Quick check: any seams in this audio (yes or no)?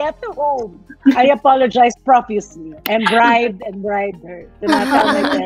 no